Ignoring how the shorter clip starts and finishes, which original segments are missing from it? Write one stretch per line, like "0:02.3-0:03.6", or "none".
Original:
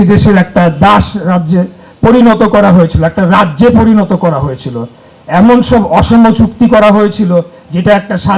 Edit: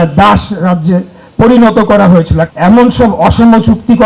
0:03.1-0:05.1